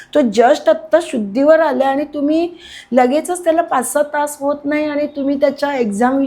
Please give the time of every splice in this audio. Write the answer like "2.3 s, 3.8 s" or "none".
none